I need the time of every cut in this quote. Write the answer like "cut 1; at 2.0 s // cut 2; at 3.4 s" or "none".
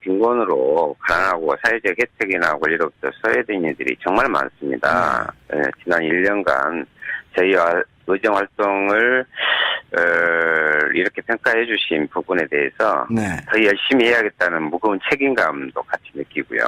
none